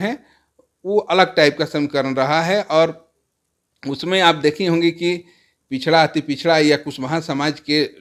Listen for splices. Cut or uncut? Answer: uncut